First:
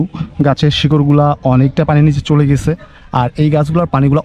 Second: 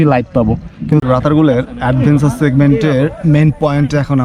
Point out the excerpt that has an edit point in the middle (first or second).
second